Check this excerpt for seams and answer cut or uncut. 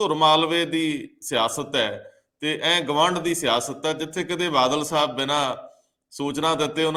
uncut